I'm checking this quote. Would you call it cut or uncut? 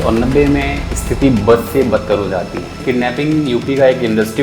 cut